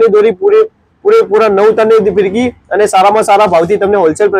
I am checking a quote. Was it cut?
no; 0 cuts

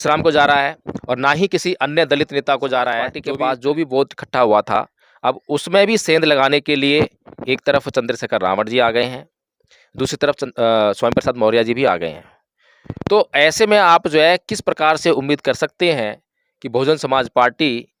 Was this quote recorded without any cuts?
no; 1 cut; at 3.2 s

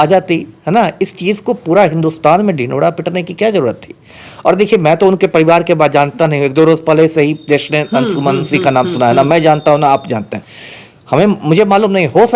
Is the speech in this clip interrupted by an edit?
no; 0 cuts

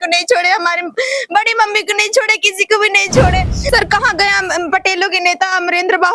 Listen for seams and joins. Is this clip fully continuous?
no; 1 cut; at 3.6 s

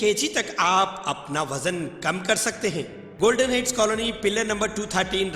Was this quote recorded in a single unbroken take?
no; 1 cut; at 3.0 s

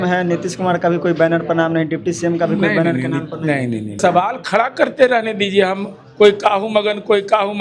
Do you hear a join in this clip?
yes; 1 cut; at 4.0 s

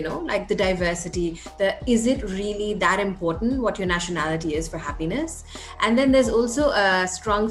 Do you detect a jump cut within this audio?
no; 0 cuts

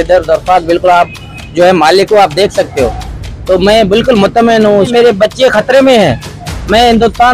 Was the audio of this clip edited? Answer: yes; 1 cut; at 4.9 s

